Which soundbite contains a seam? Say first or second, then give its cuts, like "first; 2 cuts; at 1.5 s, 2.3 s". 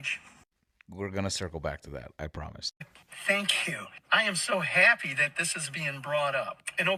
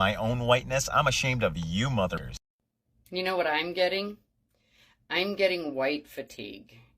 second; 1 cut; at 2.2 s